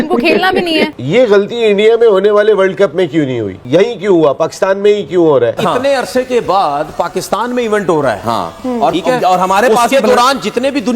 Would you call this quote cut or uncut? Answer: cut